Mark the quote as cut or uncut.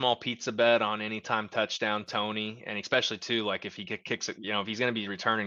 uncut